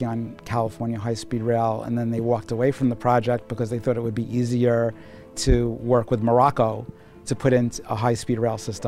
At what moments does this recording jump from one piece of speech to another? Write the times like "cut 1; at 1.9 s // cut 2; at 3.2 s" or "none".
none